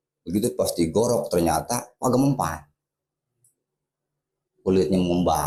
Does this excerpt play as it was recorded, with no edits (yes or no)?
yes